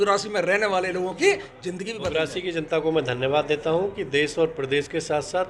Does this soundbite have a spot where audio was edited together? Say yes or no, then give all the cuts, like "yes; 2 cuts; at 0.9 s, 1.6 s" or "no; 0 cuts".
yes; 1 cut; at 1.9 s